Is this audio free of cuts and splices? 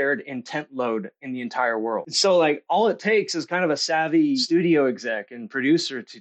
no; 2 cuts; at 2.1 s, 4.4 s

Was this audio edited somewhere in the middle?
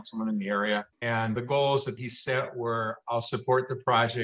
yes; 1 cut; at 0.9 s

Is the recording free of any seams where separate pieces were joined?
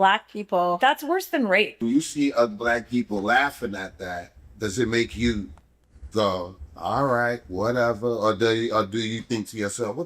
no; 1 cut; at 1.7 s

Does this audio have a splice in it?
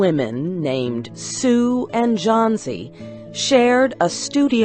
yes; 1 cut; at 1.0 s

